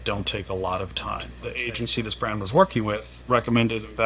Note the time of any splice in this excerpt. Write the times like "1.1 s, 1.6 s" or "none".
1.3 s, 3.1 s